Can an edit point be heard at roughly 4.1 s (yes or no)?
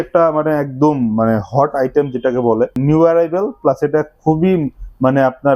no